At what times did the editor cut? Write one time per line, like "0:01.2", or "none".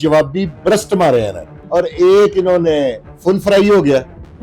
0:01.6